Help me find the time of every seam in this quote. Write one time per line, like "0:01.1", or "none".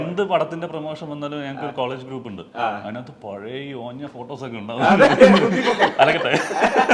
none